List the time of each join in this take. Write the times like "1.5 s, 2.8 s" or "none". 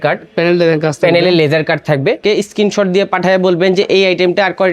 2.2 s